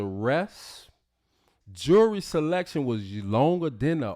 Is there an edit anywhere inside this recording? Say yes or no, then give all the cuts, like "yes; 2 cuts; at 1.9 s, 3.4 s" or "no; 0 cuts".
yes; 1 cut; at 1.5 s